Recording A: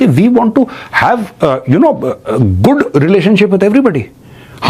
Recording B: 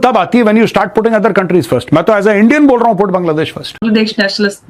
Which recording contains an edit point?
B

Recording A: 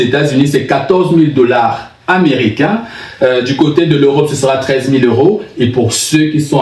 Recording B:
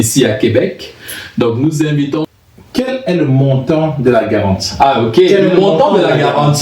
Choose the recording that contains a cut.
B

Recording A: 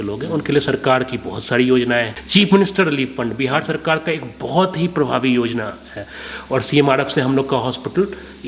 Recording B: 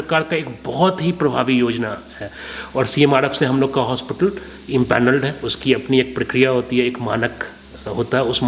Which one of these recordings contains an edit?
A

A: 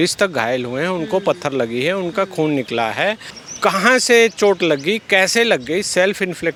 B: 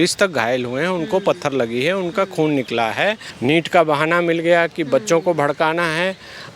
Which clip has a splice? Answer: B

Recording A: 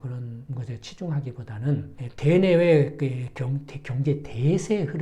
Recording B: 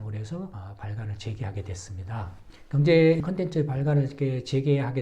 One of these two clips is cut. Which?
B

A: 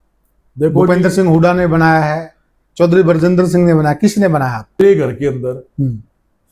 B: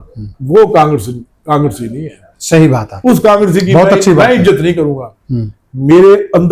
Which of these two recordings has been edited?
A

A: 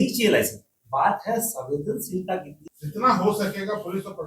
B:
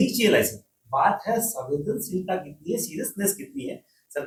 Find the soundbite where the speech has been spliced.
A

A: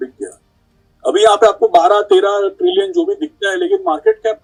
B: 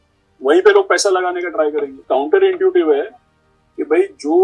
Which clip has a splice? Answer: B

